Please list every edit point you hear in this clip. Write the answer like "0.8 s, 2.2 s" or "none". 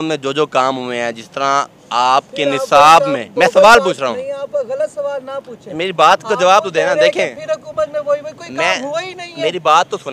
none